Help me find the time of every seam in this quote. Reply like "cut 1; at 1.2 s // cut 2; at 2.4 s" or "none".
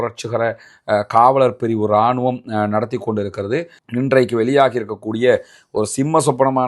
cut 1; at 3.8 s